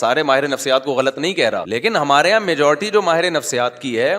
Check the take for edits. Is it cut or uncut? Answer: cut